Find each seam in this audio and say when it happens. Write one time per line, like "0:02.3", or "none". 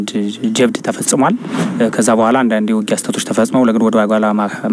0:01.6